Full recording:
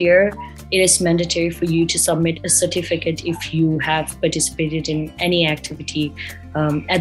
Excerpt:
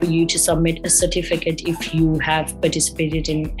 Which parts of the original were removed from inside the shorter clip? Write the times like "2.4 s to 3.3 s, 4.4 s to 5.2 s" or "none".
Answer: none